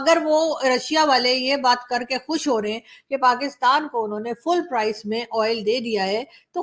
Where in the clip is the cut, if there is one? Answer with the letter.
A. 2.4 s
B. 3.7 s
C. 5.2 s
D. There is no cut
D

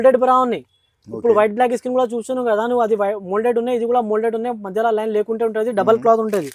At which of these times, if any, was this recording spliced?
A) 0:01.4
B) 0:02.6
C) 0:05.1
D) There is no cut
D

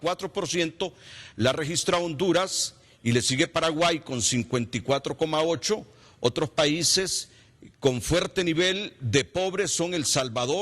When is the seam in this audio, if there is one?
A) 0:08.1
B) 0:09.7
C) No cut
B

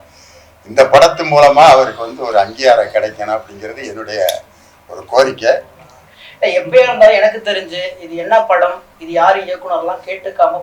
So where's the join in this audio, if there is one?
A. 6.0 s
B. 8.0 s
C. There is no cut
A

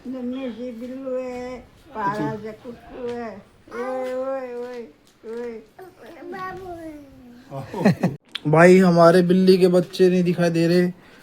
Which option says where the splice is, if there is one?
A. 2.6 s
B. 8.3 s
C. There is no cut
B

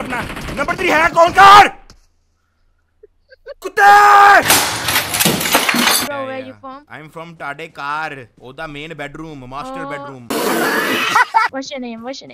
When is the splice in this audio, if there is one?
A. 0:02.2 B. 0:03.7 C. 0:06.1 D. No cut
C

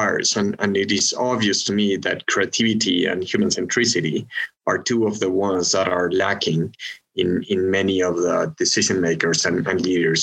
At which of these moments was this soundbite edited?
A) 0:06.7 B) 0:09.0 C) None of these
C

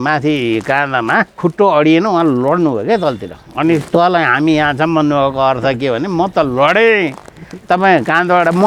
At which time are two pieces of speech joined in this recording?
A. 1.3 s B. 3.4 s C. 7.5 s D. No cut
A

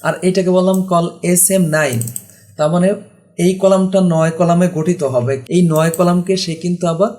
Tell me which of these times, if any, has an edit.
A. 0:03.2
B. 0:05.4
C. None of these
B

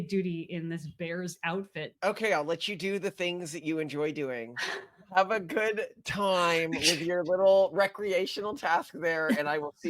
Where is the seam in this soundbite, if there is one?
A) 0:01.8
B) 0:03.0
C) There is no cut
A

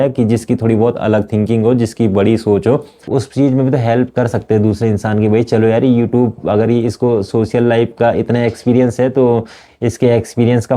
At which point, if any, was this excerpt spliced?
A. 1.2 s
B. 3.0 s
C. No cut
B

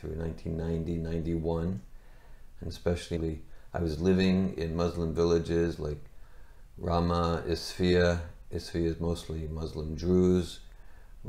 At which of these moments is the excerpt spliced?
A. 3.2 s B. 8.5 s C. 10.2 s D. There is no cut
A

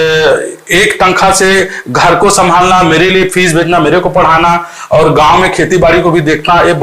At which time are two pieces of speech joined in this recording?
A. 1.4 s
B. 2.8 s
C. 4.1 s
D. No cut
D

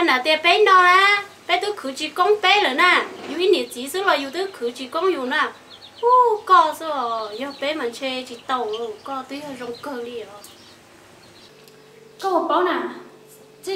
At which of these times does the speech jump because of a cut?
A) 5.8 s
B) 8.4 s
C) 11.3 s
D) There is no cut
C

